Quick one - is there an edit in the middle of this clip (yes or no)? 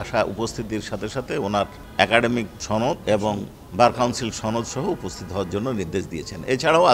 no